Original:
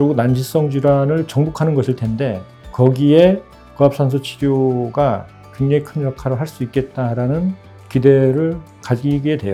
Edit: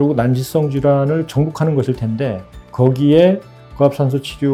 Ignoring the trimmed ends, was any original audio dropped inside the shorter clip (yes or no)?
no